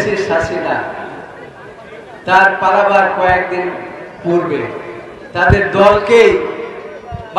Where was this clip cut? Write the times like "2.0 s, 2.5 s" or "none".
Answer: none